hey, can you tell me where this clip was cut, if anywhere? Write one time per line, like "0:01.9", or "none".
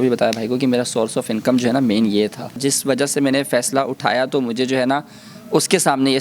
0:02.6